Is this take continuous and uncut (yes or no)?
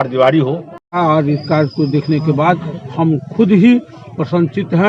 no